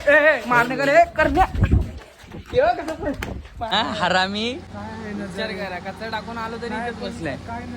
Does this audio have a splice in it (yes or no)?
yes